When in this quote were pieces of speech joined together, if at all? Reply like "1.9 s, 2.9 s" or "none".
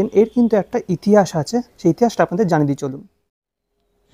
none